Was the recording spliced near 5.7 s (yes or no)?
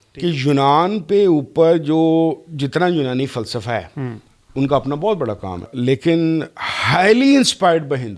yes